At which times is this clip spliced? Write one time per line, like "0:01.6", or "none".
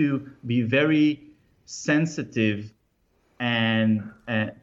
none